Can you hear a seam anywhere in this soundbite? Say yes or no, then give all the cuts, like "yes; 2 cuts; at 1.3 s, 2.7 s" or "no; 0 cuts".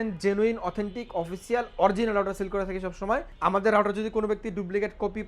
yes; 1 cut; at 3.3 s